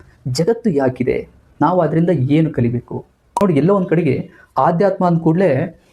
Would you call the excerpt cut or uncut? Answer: cut